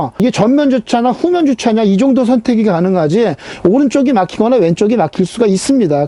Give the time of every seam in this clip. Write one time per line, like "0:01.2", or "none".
none